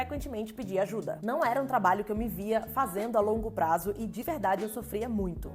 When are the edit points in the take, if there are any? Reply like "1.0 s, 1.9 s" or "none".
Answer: 1.1 s